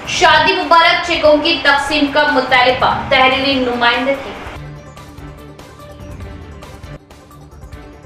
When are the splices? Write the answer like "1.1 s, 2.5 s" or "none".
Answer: none